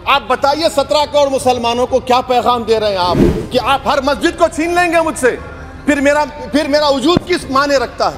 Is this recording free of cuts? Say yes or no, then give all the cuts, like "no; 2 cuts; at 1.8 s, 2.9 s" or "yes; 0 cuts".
no; 1 cut; at 3.3 s